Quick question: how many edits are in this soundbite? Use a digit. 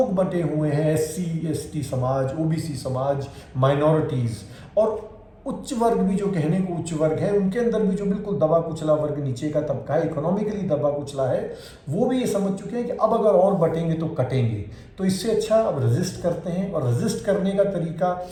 0